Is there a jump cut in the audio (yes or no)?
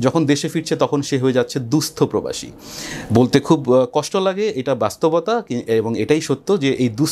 no